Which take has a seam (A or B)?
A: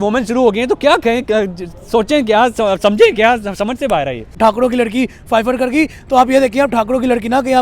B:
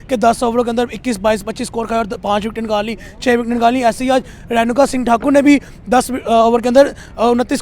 A